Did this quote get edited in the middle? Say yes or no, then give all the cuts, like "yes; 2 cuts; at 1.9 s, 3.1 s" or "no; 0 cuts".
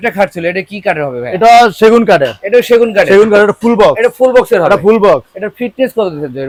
no; 0 cuts